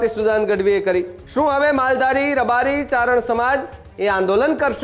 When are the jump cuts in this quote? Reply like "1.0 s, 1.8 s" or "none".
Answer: 1.2 s